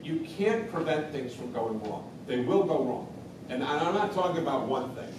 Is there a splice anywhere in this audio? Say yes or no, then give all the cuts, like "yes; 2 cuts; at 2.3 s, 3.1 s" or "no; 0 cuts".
no; 0 cuts